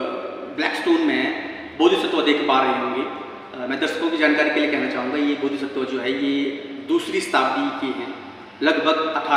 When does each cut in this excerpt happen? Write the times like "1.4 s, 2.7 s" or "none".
none